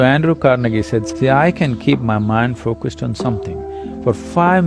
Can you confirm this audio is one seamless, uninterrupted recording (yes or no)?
no